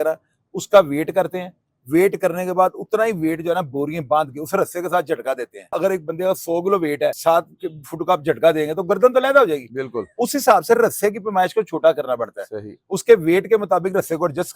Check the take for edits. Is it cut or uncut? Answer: cut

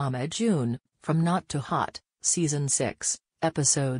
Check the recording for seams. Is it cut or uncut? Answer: cut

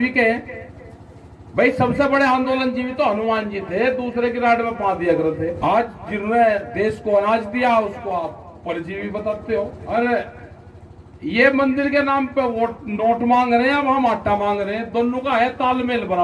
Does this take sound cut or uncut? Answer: cut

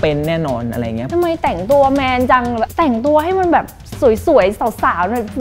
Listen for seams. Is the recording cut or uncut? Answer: cut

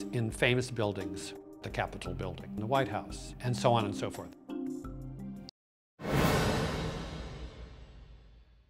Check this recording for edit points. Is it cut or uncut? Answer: uncut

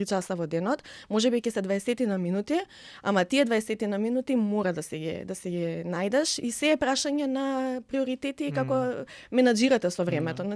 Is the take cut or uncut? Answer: uncut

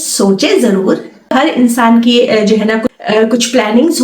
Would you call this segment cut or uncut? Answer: cut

